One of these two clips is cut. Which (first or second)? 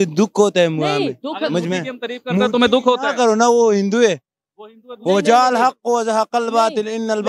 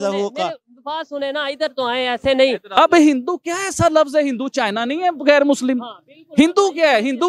second